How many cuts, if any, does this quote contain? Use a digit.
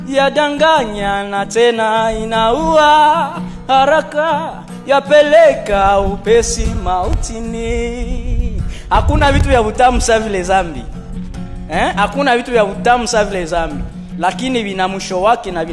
0